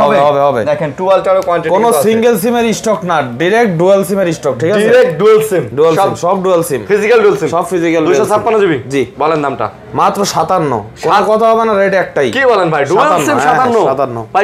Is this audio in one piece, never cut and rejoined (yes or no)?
yes